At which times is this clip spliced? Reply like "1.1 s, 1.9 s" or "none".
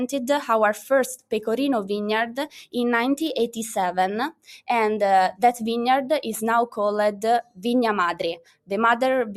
none